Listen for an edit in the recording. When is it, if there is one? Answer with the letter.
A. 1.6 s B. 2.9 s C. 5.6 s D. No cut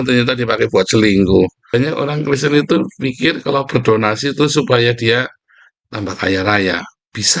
A